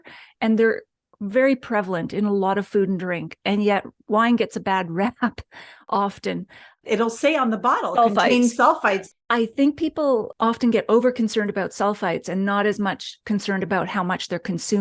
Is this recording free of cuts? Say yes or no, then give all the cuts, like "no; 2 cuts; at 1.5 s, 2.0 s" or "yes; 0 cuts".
no; 2 cuts; at 6.9 s, 9.1 s